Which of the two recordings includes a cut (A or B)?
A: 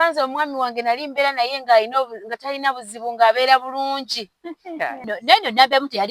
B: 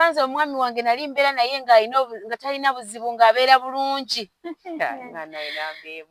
A